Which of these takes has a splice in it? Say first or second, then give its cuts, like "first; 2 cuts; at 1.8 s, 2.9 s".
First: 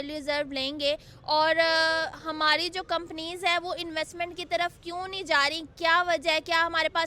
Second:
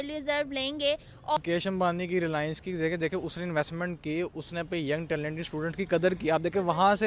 second; 1 cut; at 1.4 s